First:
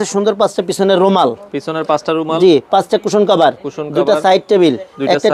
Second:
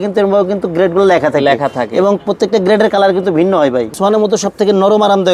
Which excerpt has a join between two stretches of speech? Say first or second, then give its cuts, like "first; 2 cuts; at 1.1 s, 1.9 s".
second; 1 cut; at 3.9 s